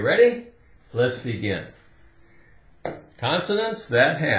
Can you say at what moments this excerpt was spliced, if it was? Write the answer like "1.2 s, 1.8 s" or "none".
1.1 s